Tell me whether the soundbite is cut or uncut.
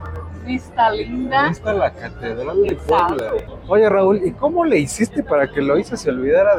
cut